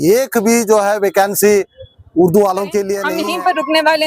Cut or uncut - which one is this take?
cut